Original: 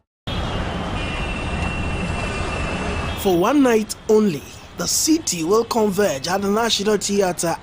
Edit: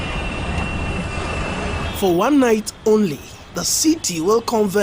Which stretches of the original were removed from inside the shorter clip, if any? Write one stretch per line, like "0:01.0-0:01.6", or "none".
0:02.1-0:02.3